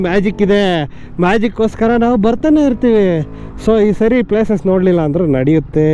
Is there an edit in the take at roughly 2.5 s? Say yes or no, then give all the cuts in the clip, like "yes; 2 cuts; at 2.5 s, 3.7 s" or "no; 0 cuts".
no; 0 cuts